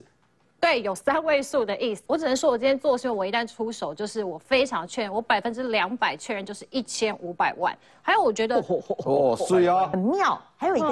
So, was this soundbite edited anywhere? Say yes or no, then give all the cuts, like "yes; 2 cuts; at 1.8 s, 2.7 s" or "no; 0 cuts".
yes; 2 cuts; at 2.0 s, 9.9 s